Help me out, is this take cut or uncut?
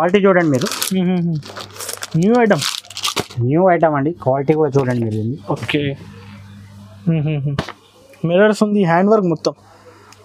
uncut